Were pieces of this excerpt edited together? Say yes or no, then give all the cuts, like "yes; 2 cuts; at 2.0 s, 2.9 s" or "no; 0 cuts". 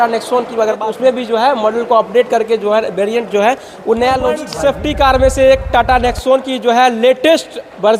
yes; 2 cuts; at 0.8 s, 4.4 s